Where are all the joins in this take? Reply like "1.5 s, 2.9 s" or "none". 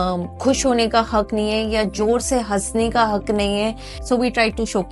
3.9 s

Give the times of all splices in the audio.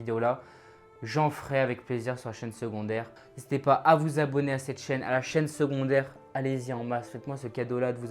3.1 s

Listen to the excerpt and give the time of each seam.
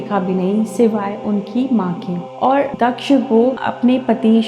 2.7 s

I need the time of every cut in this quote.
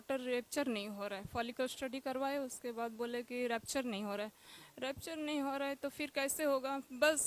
none

